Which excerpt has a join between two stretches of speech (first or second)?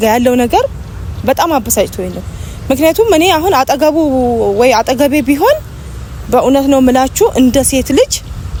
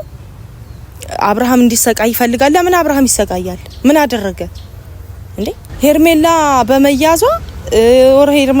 second